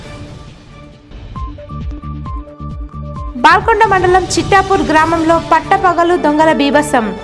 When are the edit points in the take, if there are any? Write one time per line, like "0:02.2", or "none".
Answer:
0:02.4